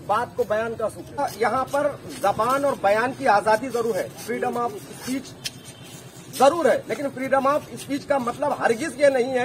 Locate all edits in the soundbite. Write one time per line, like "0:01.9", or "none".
0:01.2